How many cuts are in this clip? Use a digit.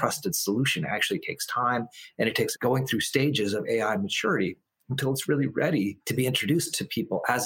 2